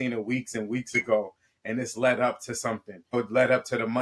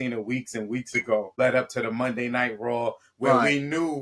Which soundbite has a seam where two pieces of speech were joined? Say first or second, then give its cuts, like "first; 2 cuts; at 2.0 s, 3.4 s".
second; 1 cut; at 1.3 s